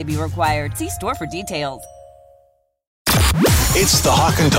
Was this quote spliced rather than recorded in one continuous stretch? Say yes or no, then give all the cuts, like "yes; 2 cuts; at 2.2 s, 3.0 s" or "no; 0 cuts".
yes; 1 cut; at 3.0 s